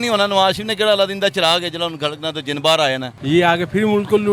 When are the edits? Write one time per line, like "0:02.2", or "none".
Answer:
0:03.1